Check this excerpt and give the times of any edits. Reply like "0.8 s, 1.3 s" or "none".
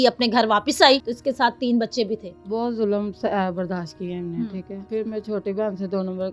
1.1 s, 2.3 s, 4.8 s